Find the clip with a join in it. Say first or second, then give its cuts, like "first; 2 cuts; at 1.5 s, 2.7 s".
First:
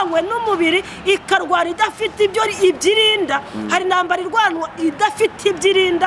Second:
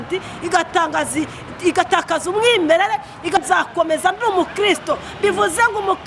second; 1 cut; at 3.4 s